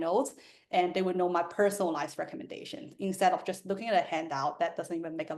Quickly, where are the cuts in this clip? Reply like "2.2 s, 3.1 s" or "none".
none